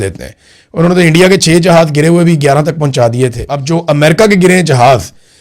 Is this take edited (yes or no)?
yes